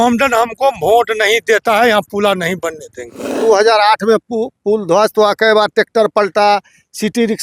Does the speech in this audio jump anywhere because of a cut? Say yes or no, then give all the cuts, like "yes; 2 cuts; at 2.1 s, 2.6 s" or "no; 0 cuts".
yes; 1 cut; at 3.4 s